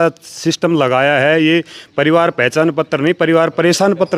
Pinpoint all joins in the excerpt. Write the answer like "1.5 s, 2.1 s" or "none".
none